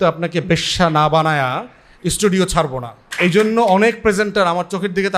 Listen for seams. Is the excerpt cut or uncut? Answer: cut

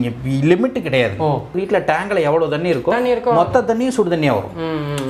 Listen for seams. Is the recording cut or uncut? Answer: cut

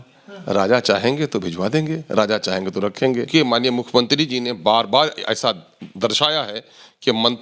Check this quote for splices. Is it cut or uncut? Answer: cut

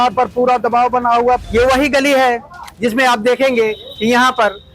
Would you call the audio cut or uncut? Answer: cut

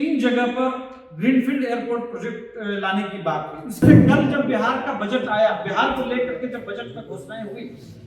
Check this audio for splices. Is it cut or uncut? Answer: cut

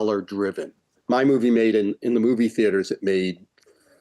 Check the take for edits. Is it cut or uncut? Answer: cut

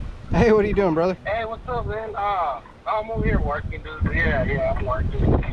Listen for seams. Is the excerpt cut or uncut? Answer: cut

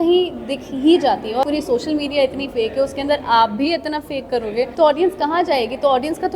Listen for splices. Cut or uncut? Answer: cut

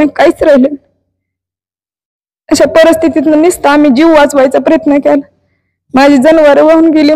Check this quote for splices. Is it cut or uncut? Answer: uncut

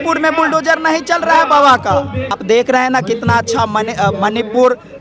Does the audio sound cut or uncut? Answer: cut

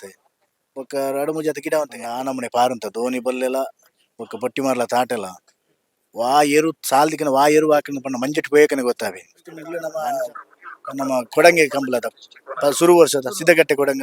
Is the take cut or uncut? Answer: cut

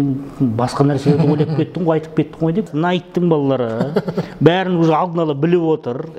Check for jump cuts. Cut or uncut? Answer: cut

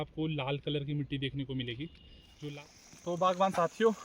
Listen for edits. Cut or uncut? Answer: cut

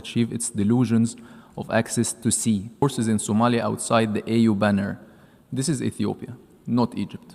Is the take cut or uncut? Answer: cut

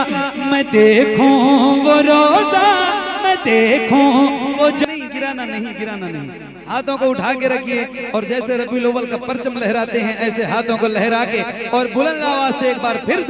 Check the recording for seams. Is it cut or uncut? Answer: cut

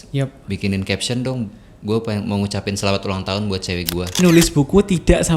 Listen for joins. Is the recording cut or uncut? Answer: cut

